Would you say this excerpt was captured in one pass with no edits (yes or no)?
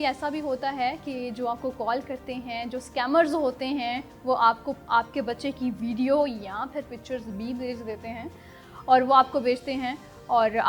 yes